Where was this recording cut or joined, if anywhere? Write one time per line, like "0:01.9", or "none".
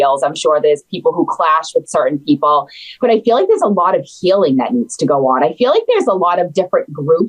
none